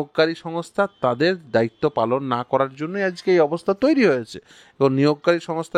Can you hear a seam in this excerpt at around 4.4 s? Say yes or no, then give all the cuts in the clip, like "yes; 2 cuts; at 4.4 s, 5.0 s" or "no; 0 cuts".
no; 0 cuts